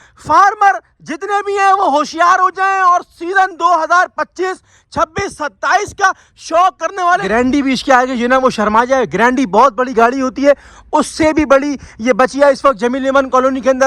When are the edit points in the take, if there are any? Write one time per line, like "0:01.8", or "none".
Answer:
0:07.2